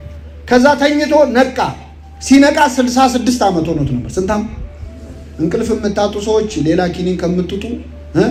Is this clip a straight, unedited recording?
yes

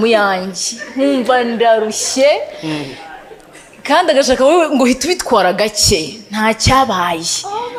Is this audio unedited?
yes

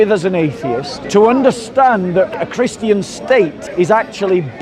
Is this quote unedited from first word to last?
no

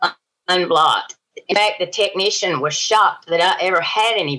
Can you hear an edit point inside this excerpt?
no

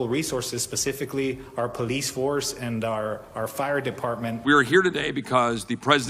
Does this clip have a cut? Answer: yes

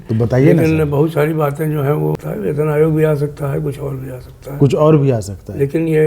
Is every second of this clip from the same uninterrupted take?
no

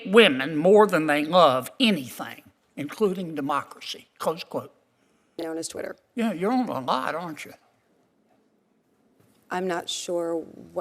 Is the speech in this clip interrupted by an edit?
yes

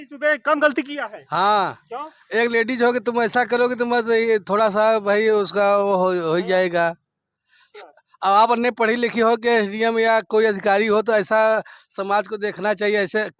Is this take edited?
no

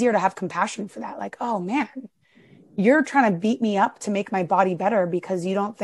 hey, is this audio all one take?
yes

